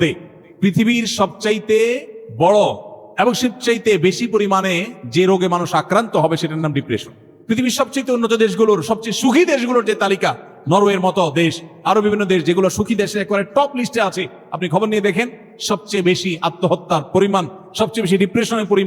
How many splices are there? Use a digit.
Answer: 1